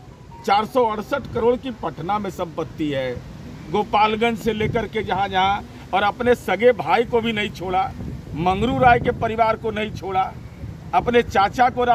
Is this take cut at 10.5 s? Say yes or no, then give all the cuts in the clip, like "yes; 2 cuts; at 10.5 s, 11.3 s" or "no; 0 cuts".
no; 0 cuts